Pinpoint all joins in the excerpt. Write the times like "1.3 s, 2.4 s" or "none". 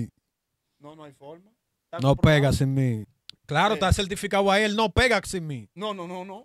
3.0 s